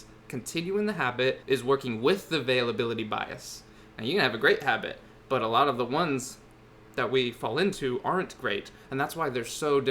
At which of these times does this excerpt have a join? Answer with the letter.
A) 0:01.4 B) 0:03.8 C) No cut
A